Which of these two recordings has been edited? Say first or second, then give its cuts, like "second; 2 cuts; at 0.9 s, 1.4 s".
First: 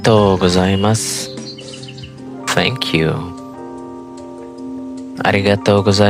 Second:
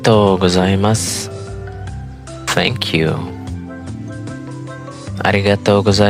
second; 4 cuts; at 1.0 s, 2.5 s, 3.3 s, 4.9 s